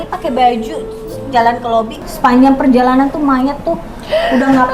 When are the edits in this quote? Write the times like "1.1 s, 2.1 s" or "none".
2.0 s